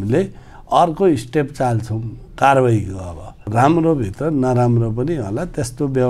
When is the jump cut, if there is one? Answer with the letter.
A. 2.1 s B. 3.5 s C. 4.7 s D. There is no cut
B